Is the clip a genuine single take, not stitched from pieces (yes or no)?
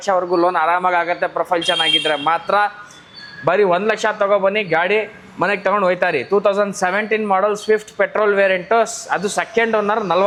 yes